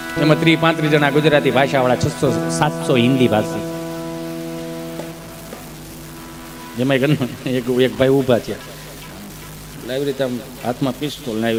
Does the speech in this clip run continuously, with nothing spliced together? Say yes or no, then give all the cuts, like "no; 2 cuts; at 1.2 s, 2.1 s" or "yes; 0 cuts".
yes; 0 cuts